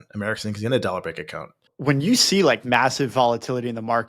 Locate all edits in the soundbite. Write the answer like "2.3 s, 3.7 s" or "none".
1.7 s